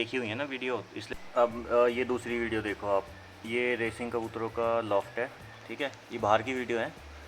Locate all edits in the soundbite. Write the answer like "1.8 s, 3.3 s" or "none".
0.9 s